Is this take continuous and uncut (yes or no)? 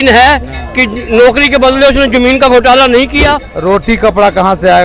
no